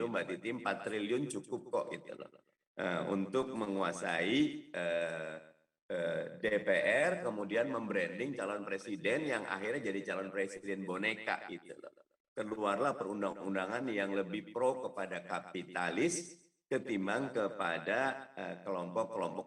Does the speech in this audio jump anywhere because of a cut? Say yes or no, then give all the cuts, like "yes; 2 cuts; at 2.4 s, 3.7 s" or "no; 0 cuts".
no; 0 cuts